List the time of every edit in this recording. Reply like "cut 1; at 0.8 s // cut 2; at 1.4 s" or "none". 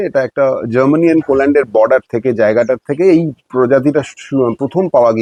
none

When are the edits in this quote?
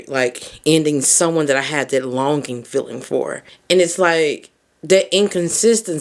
cut 1; at 3.5 s

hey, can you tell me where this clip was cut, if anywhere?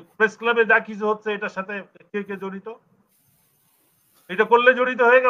none

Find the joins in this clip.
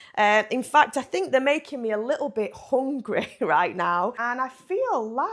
cut 1; at 4.2 s

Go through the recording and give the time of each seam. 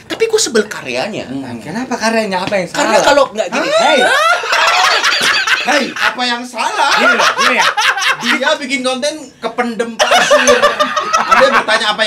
none

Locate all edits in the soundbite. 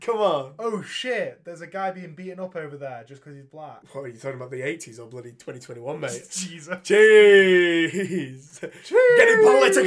cut 1; at 3.8 s

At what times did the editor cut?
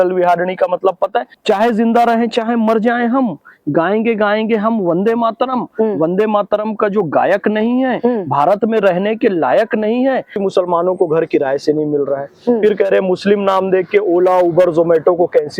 cut 1; at 1.3 s // cut 2; at 10.3 s

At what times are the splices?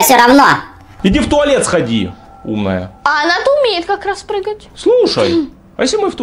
none

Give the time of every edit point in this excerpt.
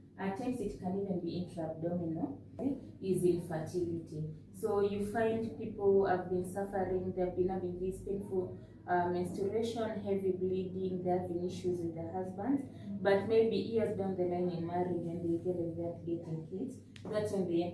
cut 1; at 2.6 s

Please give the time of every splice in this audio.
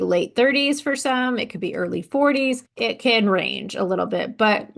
cut 1; at 2.7 s

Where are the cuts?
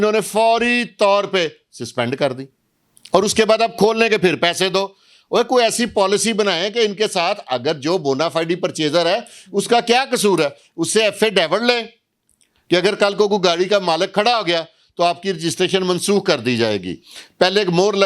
none

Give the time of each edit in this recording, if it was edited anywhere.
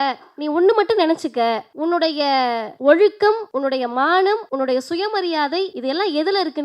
cut 1; at 1.7 s // cut 2; at 2.7 s // cut 3; at 3.5 s // cut 4; at 4.5 s // cut 5; at 5.8 s

